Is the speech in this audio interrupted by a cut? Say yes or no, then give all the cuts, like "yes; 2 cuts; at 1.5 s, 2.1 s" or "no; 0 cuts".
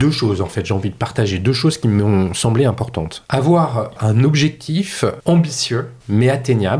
yes; 4 cuts; at 3.2 s, 4.0 s, 5.2 s, 5.9 s